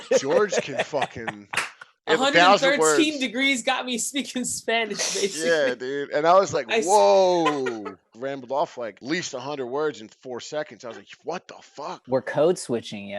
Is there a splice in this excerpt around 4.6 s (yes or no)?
no